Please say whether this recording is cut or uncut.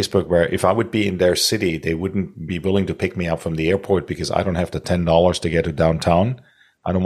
uncut